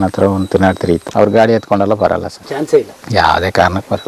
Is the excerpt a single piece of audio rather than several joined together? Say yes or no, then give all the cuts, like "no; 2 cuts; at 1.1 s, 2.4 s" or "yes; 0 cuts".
no; 2 cuts; at 1.1 s, 2.4 s